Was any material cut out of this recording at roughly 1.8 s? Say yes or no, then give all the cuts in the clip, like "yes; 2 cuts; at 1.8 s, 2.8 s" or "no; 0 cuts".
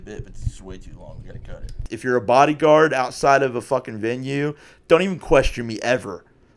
yes; 1 cut; at 1.8 s